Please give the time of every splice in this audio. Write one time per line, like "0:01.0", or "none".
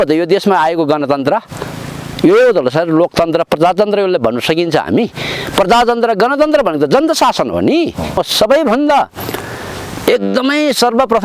0:08.0